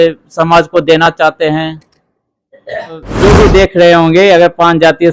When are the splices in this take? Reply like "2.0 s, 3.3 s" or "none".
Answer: 3.1 s